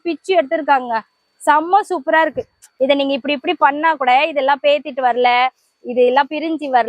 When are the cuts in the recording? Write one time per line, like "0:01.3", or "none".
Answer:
0:02.6